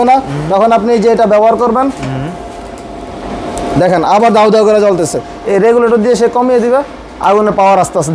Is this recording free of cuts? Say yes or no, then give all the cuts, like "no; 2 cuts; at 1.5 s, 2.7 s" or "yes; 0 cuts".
no; 1 cut; at 5.3 s